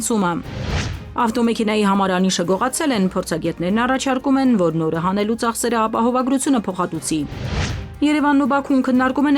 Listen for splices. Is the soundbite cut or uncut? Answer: cut